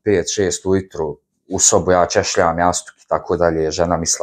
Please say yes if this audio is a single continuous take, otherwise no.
yes